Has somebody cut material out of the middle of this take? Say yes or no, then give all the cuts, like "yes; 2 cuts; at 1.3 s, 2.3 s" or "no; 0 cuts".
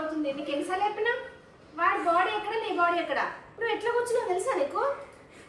yes; 1 cut; at 3.5 s